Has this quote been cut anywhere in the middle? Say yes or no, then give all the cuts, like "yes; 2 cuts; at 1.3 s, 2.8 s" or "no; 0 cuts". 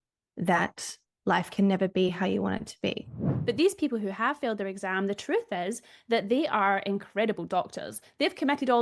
yes; 1 cut; at 3.3 s